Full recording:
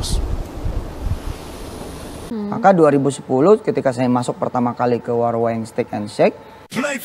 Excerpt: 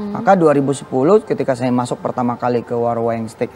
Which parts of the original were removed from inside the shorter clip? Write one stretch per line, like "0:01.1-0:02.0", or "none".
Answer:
none

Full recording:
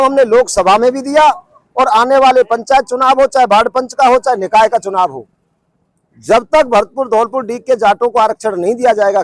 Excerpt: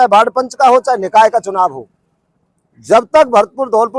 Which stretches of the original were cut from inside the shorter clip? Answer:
none

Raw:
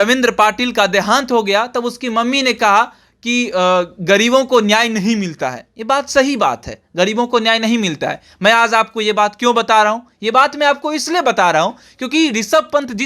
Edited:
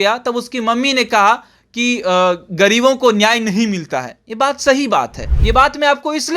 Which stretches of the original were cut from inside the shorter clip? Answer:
0:06.8-0:10.1

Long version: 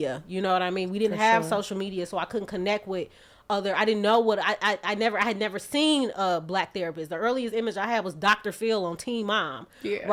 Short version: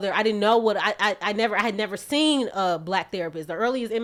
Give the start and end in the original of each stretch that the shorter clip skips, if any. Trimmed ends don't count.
none

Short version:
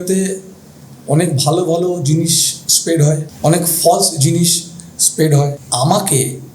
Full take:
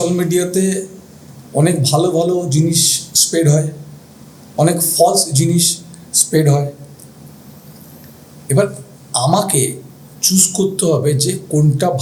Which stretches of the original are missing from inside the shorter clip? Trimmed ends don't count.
0:03.7-0:04.4
0:06.8-0:09.0

